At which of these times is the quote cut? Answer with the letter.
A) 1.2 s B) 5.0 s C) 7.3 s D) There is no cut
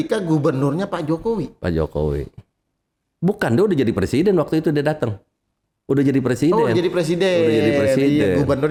D